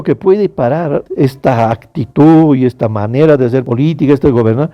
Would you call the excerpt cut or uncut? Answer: cut